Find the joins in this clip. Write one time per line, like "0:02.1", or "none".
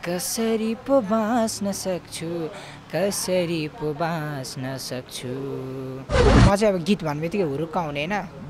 0:06.2